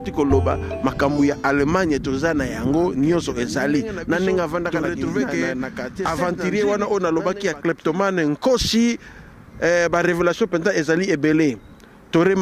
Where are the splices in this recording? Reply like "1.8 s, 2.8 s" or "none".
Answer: 6.0 s